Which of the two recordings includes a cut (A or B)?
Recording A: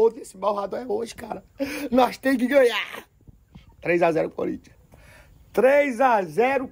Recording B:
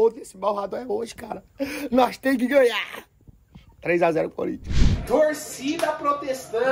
B